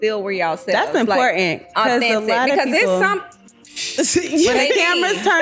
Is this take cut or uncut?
uncut